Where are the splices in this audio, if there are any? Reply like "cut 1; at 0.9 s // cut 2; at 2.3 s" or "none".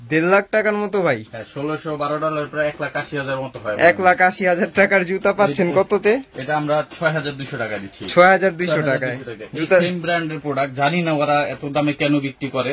none